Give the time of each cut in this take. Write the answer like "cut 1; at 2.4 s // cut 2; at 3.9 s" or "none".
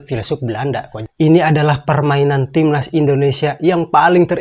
cut 1; at 1.0 s